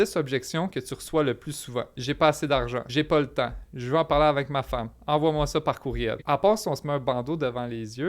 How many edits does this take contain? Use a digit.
3